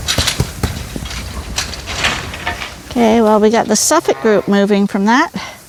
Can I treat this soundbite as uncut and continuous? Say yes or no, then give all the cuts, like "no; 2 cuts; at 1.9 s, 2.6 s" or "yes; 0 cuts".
yes; 0 cuts